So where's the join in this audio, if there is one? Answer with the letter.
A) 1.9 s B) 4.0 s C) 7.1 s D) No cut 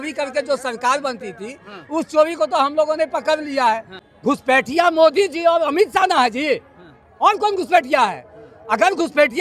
B